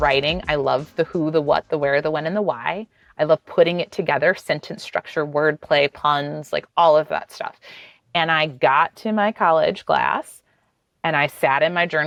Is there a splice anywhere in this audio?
no; 0 cuts

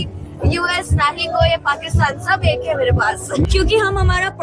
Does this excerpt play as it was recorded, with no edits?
no; 1 cut; at 3.4 s

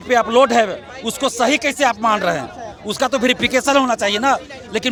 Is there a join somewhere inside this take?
no; 0 cuts

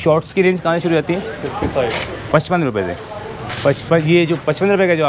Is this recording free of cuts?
yes; 0 cuts

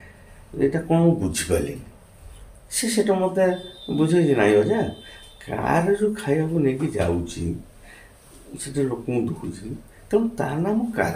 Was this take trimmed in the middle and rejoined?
no; 0 cuts

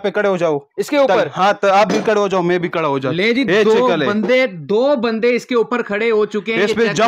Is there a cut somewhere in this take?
no; 0 cuts

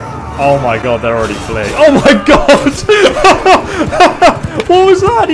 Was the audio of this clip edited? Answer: no; 0 cuts

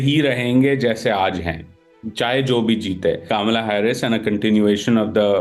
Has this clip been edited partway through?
yes; 1 cut; at 3.2 s

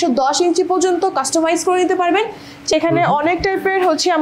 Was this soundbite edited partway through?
yes; 1 cut; at 2.7 s

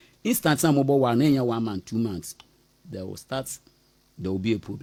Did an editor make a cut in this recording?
no; 0 cuts

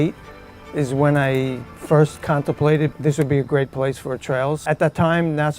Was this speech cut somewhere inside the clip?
yes; 1 cut; at 4.6 s

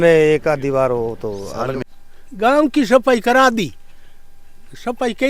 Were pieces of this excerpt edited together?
yes; 1 cut; at 1.8 s

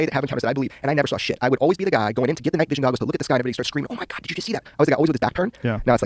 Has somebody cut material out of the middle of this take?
no; 0 cuts

